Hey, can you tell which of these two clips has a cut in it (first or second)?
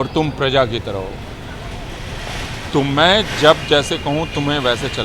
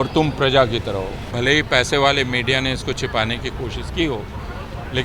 second